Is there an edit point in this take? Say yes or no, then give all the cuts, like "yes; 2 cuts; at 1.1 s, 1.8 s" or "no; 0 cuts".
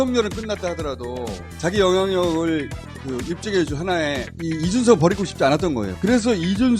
yes; 1 cut; at 5.9 s